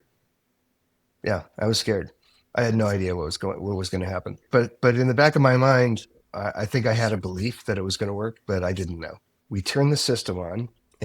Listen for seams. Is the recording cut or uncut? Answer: cut